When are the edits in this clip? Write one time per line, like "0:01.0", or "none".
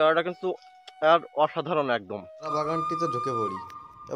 0:02.5

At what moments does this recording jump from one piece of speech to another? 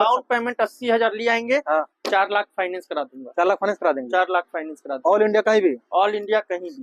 none

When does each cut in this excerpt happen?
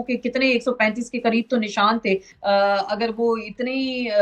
0:02.3

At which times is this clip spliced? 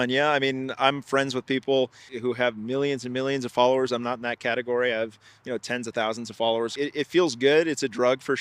0:02.0
0:06.7

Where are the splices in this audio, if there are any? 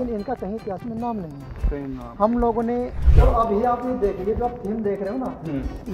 0:03.0

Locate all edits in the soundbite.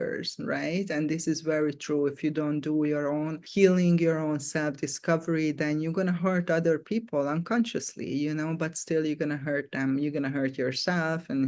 none

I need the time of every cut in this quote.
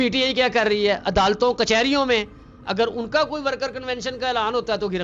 none

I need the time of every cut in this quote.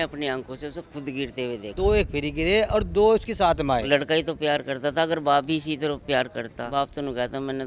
0:01.7
0:03.8
0:06.6

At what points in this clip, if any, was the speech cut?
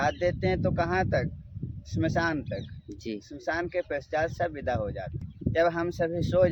0:05.3

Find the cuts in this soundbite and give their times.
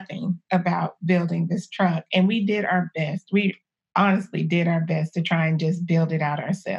none

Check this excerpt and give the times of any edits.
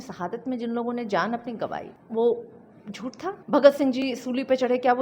0:01.9
0:03.4

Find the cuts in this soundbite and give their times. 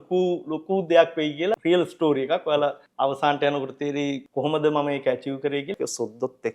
0:01.6
0:02.8
0:04.2
0:05.8

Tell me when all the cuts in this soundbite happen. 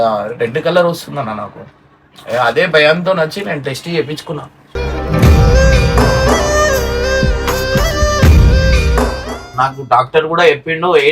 0:09.5

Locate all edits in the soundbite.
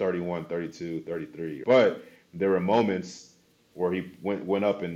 0:01.5

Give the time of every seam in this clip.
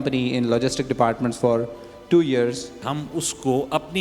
0:02.8

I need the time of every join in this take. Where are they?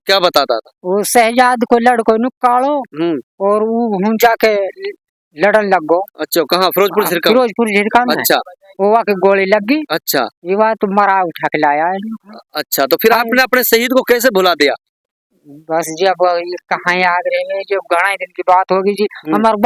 none

